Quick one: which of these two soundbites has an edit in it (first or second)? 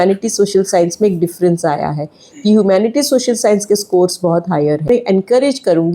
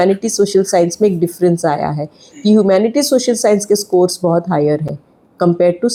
first